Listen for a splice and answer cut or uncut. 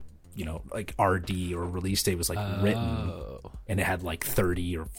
uncut